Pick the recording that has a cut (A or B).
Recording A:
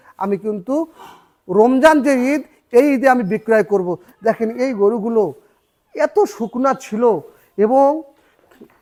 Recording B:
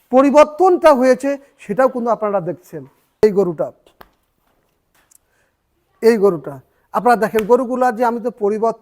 B